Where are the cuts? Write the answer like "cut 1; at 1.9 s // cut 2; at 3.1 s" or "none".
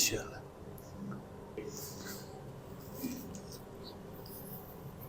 cut 1; at 1.6 s